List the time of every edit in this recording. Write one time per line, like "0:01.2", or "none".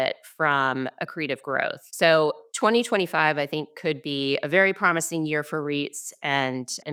none

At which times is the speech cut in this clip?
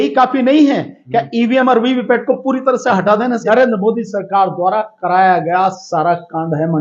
0:03.4

